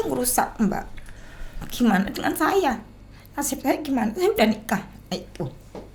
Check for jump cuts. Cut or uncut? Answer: uncut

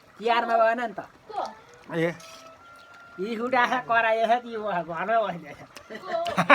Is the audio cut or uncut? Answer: uncut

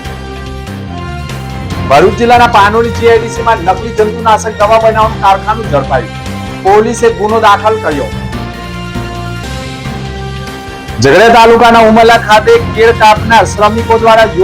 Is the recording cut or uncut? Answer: cut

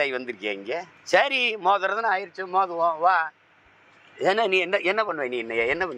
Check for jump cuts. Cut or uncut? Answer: cut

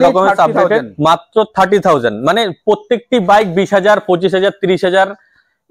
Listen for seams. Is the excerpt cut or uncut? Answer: uncut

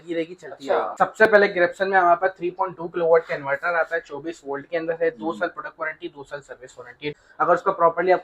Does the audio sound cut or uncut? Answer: cut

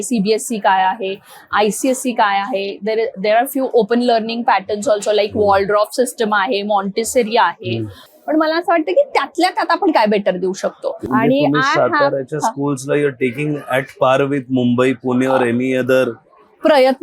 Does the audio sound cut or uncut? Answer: cut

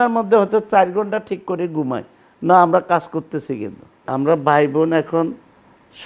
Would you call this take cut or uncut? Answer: cut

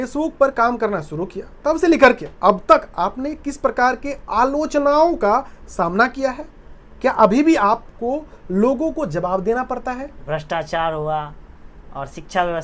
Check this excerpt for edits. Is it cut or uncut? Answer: cut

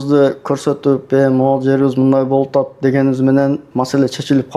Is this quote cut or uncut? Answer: cut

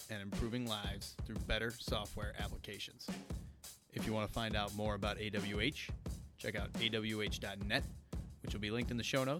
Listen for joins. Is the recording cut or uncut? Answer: uncut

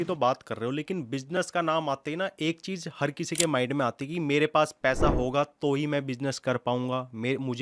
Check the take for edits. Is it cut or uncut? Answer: uncut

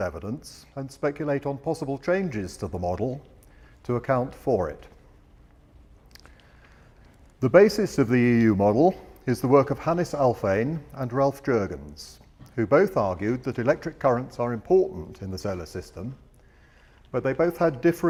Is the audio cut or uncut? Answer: uncut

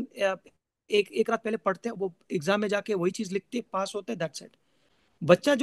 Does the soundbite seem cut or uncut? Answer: uncut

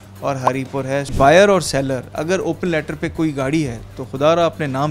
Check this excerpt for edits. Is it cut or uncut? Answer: cut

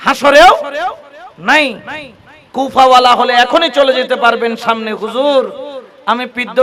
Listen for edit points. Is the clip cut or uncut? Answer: uncut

